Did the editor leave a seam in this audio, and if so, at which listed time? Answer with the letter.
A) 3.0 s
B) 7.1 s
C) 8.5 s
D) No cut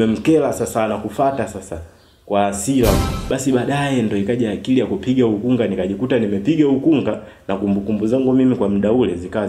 A